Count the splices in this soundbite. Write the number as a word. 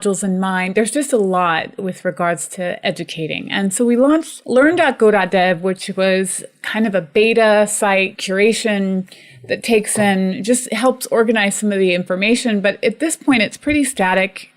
two